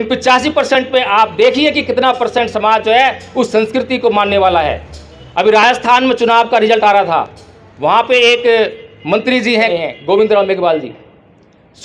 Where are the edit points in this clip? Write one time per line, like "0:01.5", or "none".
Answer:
none